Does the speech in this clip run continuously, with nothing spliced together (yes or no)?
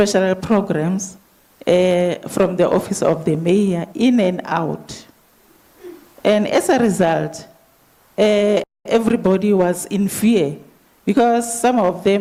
yes